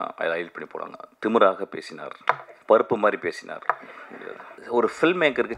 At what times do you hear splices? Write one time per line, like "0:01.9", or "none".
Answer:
0:02.5
0:04.5

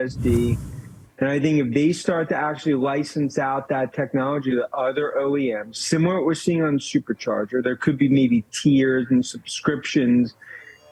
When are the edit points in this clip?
none

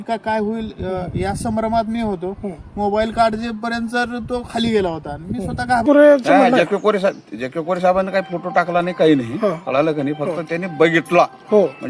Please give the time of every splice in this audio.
0:05.8

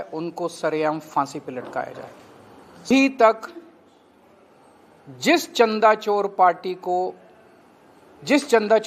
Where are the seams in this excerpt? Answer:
0:02.8

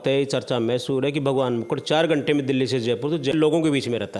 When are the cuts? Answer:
0:03.3

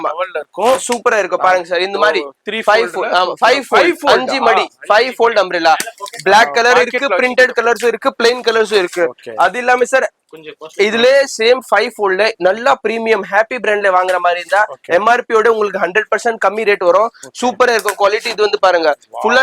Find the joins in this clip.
none

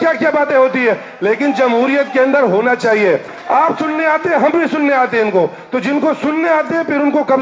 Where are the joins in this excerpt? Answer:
0:03.3

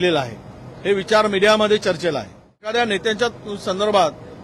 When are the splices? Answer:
0:02.6

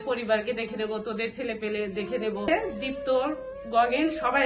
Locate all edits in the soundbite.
0:02.5

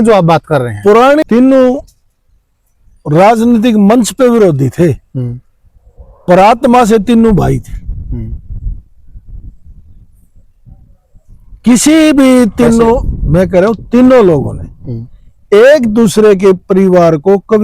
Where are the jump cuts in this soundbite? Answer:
0:01.2

